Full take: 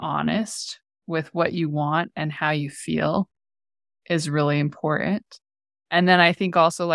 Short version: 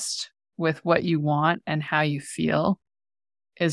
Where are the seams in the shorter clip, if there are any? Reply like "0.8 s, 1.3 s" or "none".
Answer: none